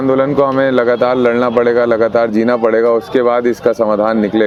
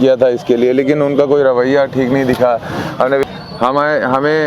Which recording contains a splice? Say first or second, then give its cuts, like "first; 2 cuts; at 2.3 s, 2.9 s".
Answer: second; 1 cut; at 3.2 s